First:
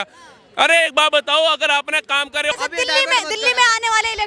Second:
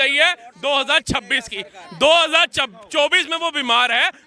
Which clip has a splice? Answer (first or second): first